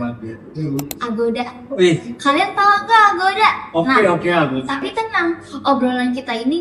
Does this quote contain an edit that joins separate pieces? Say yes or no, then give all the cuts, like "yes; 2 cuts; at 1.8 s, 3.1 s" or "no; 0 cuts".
no; 0 cuts